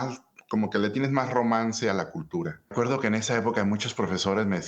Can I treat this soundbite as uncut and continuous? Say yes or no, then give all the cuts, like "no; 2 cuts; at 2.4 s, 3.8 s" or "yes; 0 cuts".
no; 1 cut; at 2.7 s